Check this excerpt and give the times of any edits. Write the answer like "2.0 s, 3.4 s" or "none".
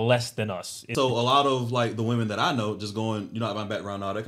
0.9 s